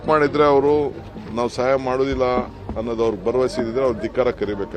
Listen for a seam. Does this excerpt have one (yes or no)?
no